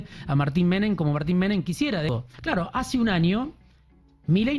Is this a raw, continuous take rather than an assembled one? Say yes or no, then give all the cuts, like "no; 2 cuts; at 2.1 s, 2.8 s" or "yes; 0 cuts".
no; 1 cut; at 2.1 s